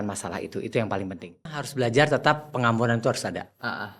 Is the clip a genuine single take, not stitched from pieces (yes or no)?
no